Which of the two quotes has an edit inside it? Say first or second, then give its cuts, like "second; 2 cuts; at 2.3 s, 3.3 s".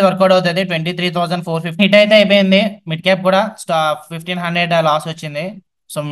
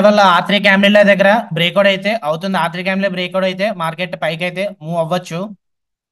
first; 1 cut; at 1.8 s